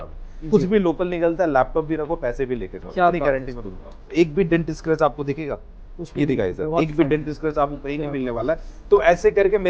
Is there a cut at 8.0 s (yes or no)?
no